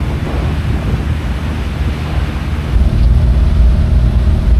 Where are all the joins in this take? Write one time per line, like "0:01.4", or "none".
none